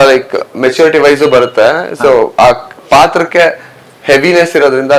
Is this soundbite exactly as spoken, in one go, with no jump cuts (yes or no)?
yes